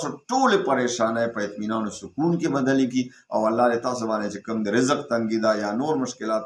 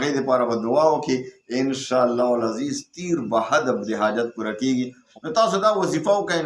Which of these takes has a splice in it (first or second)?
second